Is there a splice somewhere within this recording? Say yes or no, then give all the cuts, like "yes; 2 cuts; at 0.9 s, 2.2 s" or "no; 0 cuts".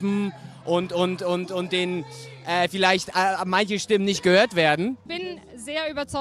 yes; 1 cut; at 5.1 s